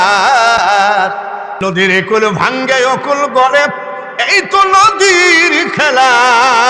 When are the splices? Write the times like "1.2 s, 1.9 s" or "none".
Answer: 1.6 s